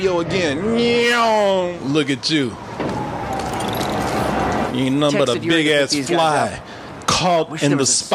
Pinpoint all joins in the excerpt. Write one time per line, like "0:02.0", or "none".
0:01.8